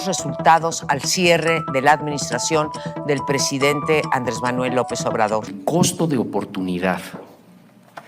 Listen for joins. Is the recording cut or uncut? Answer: cut